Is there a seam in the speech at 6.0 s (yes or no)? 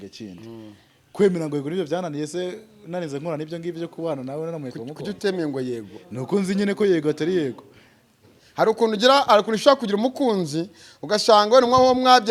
no